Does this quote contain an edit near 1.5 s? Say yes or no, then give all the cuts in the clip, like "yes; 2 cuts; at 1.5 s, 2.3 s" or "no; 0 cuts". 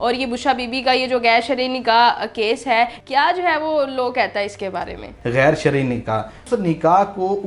no; 3 cuts; at 3.0 s, 5.1 s, 6.4 s